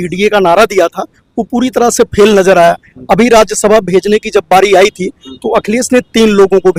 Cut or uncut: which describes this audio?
uncut